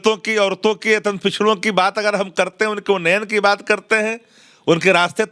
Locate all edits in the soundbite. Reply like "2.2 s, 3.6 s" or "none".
none